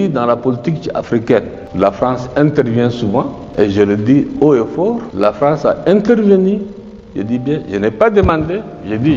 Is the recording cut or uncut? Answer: uncut